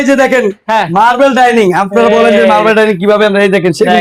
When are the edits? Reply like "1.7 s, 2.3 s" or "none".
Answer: none